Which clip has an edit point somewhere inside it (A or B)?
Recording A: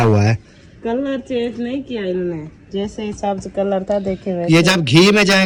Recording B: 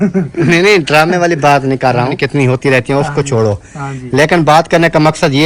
B